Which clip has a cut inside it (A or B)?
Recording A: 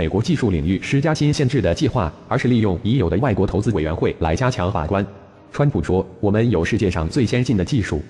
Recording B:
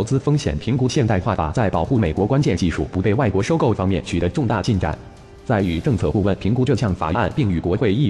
B